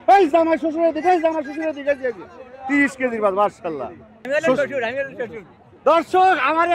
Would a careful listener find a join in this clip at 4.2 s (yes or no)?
yes